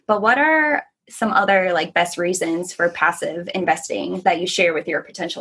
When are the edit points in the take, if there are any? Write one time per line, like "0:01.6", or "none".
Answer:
none